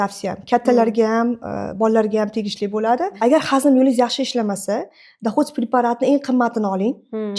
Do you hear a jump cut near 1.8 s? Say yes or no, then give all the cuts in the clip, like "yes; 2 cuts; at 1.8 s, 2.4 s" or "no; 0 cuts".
no; 1 cut; at 3.1 s